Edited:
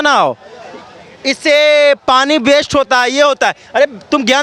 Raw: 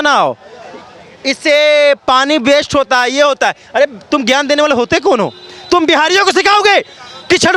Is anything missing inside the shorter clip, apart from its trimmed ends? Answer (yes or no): no